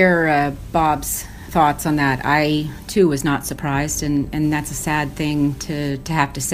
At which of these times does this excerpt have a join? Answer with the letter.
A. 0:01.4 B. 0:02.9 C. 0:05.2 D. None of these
A